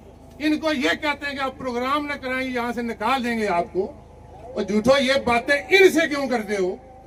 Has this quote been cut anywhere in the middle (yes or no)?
no